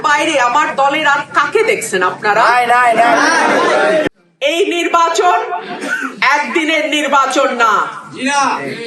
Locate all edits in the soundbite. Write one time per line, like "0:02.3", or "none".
0:04.1